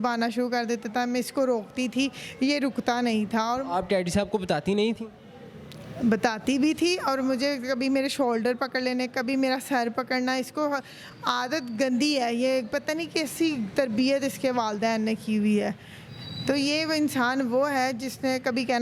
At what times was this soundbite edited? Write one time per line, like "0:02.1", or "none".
none